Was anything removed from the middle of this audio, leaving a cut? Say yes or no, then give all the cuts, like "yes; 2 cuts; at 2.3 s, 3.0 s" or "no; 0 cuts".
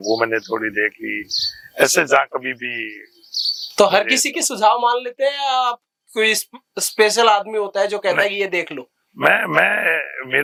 no; 0 cuts